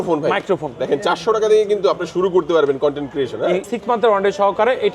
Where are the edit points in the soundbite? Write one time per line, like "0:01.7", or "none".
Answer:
0:03.6